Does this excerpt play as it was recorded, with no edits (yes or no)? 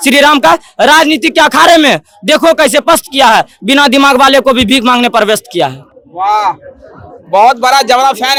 yes